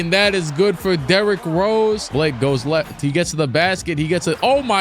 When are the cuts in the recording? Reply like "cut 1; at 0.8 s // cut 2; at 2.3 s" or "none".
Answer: cut 1; at 2.1 s